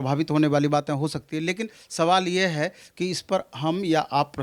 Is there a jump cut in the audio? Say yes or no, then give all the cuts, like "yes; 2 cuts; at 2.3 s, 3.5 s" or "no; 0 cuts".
no; 0 cuts